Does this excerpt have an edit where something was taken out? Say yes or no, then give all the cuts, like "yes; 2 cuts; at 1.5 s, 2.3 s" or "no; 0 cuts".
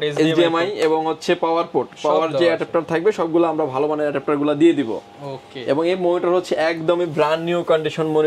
no; 0 cuts